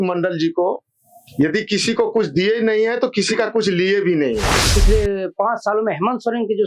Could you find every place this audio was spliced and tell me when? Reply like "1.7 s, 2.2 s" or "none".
4.8 s

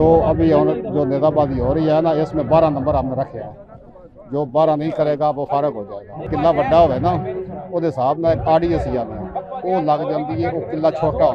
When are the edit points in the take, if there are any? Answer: 6.3 s

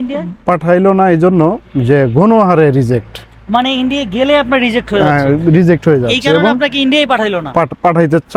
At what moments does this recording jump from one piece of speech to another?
none

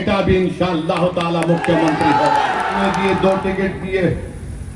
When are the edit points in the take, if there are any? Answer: 2.8 s

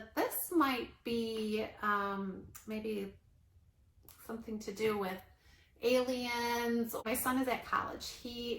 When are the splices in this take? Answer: 7.0 s

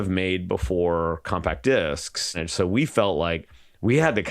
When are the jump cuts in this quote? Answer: 2.3 s

